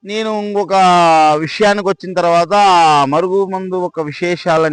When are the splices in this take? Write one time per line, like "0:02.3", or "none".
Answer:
none